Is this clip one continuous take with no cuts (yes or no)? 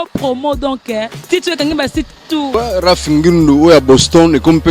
no